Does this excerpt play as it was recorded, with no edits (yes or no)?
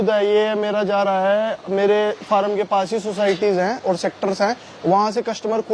yes